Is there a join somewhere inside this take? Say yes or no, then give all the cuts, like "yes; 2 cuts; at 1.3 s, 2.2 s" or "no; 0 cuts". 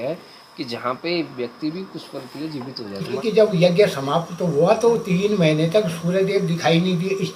yes; 1 cut; at 3.0 s